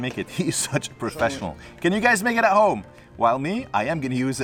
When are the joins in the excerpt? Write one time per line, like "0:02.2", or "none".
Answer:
none